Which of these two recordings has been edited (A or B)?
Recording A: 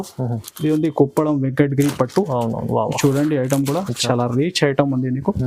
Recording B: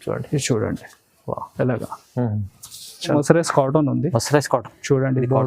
B